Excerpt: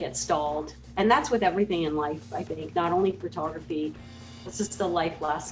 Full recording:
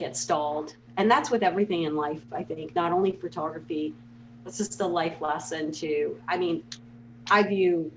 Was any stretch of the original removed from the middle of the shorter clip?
no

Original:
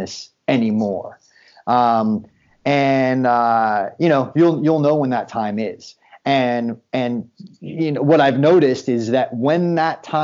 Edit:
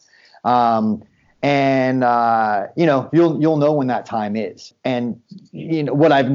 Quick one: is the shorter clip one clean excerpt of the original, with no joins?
no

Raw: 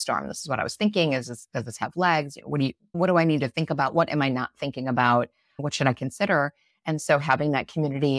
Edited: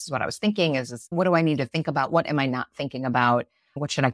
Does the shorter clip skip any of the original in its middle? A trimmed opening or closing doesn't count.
yes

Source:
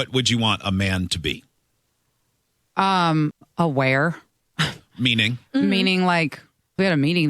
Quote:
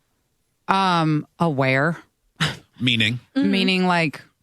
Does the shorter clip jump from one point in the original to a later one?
yes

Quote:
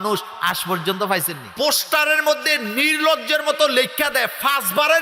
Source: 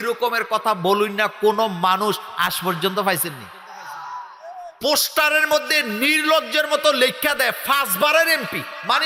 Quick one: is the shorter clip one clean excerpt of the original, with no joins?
no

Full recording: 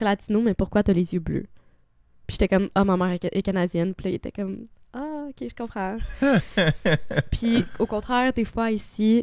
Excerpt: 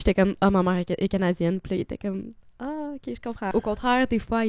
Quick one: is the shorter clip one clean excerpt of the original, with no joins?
no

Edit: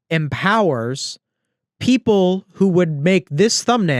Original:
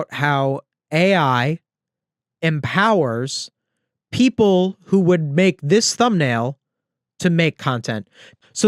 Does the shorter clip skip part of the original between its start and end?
no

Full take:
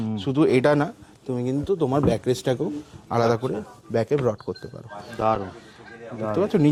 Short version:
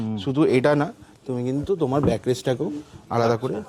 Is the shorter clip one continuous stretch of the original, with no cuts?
yes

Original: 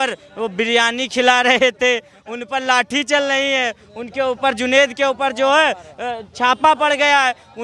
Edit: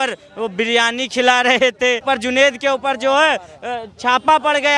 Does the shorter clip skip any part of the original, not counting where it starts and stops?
yes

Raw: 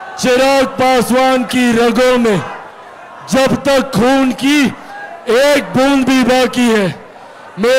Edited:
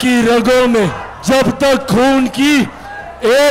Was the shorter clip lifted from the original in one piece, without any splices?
no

